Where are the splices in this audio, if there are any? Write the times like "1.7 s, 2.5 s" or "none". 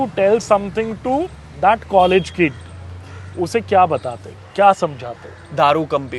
none